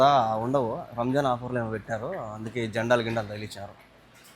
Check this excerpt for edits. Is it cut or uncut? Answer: uncut